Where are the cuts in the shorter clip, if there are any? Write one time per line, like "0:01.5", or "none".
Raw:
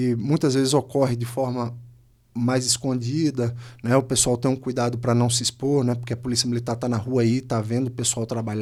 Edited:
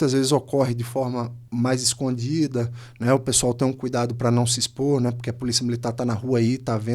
0:01.4